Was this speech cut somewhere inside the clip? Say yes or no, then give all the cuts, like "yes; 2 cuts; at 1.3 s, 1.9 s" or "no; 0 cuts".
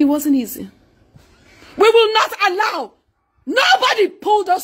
no; 0 cuts